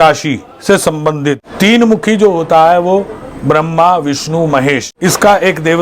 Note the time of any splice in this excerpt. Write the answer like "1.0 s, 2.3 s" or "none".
1.4 s, 4.9 s